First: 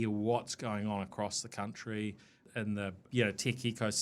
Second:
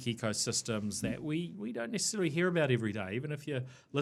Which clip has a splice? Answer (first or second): first